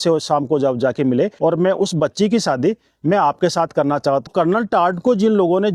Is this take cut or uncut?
cut